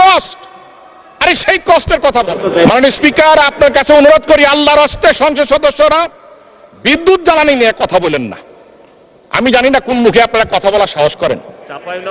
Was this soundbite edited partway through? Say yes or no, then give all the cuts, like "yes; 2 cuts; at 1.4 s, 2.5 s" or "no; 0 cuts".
yes; 1 cut; at 2.4 s